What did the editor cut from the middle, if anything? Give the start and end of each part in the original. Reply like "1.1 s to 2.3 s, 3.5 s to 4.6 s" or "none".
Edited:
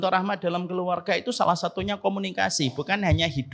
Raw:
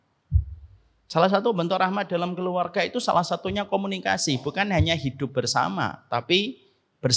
none